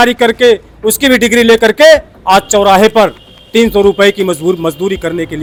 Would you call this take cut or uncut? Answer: uncut